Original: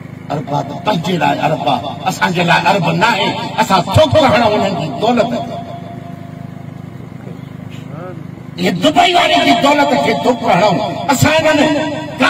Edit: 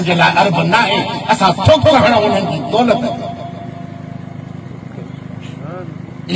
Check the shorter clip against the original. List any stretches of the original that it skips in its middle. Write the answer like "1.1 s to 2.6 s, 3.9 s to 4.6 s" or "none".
none